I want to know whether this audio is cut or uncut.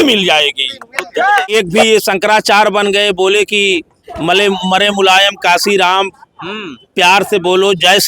cut